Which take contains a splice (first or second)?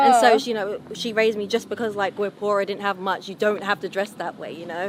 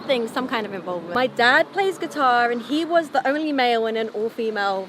second